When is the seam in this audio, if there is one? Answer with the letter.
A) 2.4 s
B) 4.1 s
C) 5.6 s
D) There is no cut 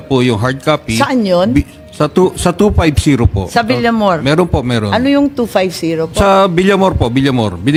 D